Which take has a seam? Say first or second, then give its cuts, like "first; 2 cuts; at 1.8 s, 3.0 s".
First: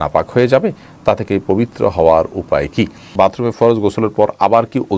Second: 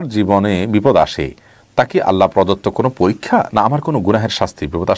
first; 1 cut; at 3.1 s